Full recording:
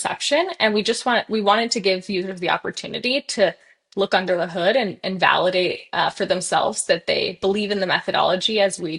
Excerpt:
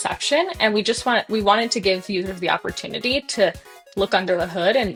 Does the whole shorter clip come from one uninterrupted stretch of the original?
yes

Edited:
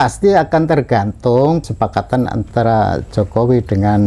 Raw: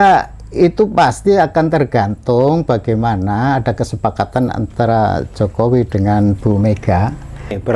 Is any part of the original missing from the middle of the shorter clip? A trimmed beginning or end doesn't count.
yes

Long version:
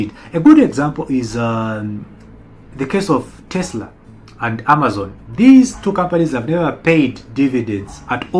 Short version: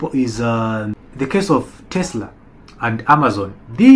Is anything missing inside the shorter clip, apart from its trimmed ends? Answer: yes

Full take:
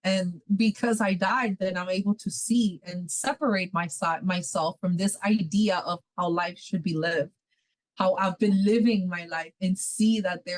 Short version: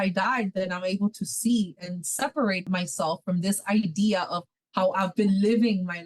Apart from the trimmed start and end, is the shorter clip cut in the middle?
yes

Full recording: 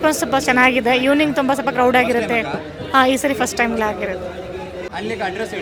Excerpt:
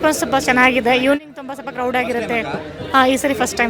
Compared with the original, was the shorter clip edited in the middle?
no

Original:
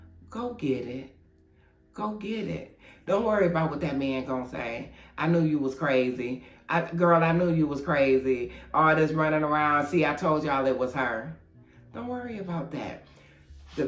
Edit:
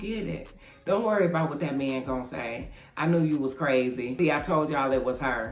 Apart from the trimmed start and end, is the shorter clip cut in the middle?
yes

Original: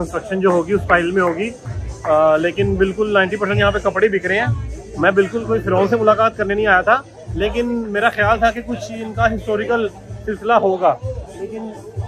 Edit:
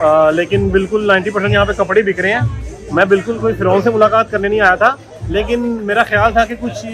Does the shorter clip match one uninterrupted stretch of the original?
yes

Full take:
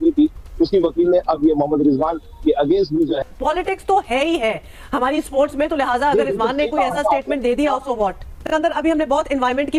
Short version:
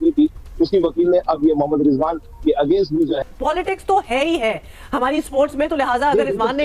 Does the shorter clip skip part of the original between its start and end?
no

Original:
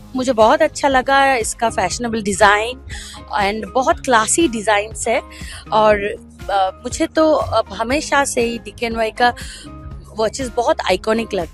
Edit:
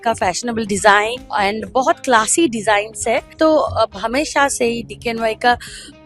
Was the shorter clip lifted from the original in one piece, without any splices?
no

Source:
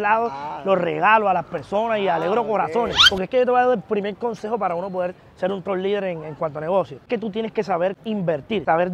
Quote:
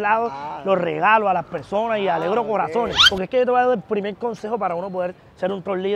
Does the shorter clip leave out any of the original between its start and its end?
no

